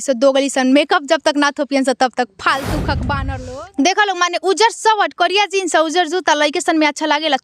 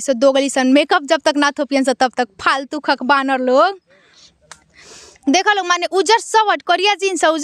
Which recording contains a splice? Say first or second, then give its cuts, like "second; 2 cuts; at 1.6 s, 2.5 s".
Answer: first; 1 cut; at 3.3 s